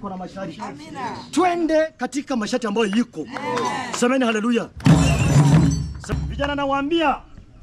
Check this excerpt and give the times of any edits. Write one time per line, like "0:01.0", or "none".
0:06.2

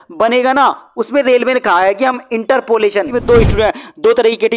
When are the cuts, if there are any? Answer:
0:03.1

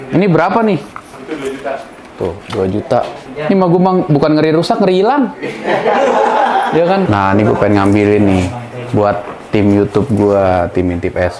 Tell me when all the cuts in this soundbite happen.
0:03.2
0:07.1

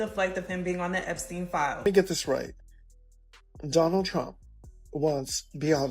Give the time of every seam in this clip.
0:01.8

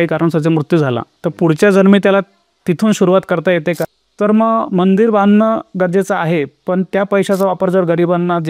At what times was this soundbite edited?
0:04.0

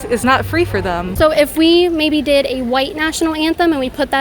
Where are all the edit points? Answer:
0:01.1

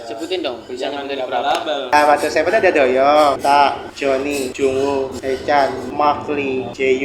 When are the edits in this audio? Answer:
0:01.9

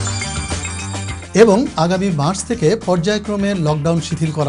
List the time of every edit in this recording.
none

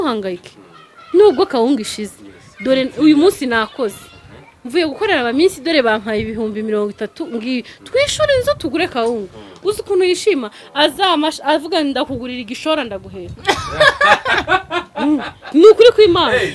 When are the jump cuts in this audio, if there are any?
none

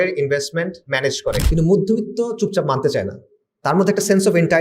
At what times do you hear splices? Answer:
0:01.4

